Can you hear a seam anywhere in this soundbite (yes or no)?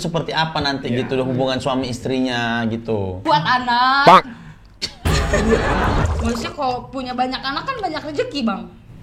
yes